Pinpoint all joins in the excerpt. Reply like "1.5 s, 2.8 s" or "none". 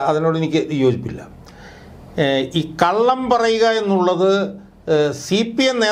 none